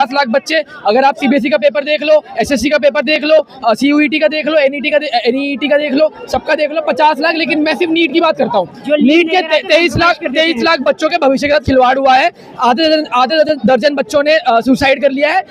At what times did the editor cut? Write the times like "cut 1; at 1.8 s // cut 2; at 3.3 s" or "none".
none